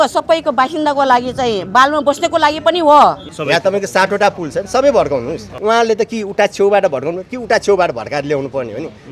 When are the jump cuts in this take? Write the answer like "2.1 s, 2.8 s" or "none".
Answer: 3.3 s, 5.5 s